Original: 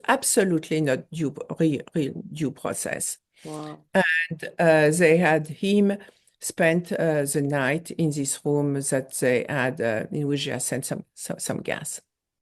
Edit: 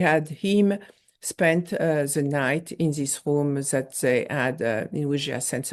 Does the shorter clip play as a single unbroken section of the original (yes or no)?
yes